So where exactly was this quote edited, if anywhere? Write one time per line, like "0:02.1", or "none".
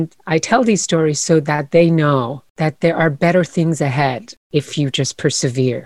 0:02.4
0:04.3